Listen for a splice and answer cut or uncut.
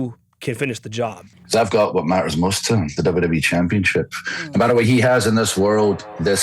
cut